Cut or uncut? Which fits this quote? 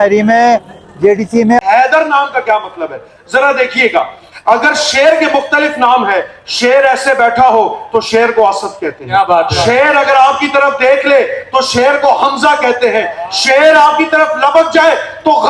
cut